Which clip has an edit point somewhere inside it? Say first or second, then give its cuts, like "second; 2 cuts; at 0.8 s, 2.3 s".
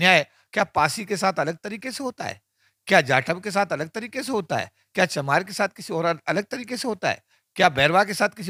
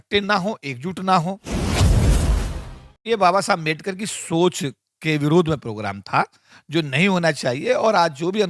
second; 2 cuts; at 1.4 s, 3.0 s